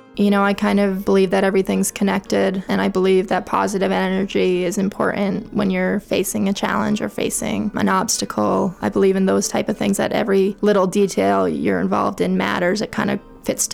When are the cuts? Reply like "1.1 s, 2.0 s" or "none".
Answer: 1.0 s, 2.6 s, 7.7 s, 8.8 s, 10.6 s